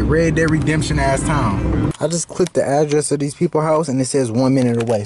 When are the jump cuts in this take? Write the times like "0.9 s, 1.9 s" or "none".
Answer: 1.9 s

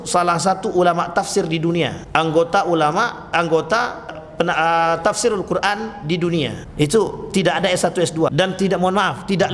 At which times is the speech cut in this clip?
2.0 s, 4.2 s, 6.6 s, 8.3 s

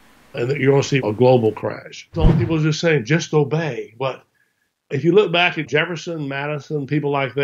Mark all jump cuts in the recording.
2.1 s

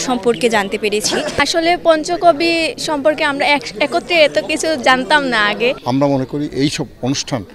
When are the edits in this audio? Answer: 1.4 s, 5.8 s

